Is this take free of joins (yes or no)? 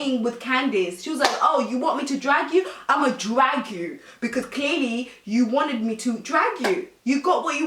yes